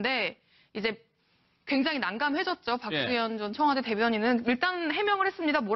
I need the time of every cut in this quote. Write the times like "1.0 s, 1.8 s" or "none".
1.6 s